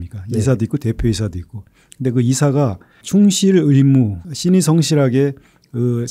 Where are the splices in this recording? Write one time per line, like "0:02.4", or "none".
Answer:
0:02.9
0:04.2